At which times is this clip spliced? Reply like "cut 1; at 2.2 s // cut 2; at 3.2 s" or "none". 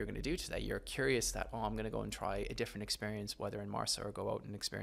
none